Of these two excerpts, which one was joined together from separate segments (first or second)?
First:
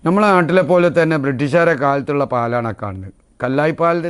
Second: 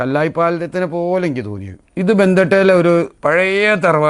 second